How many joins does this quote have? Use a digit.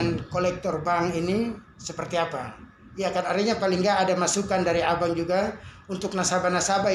0